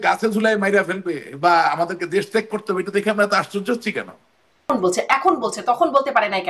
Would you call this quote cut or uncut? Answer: cut